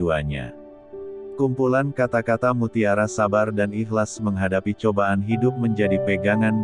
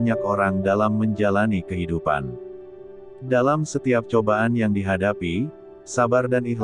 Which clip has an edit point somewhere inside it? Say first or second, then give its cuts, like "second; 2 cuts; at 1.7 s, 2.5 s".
first; 1 cut; at 1.1 s